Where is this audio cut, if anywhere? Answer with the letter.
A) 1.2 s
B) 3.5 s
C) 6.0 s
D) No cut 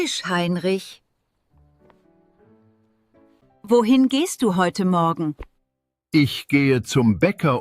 B